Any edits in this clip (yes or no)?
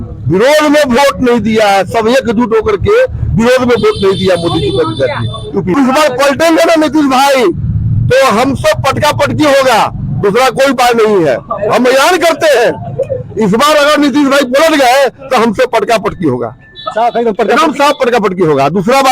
yes